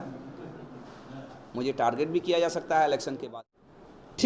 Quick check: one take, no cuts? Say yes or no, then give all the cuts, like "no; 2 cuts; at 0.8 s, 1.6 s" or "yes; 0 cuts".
no; 1 cut; at 3.3 s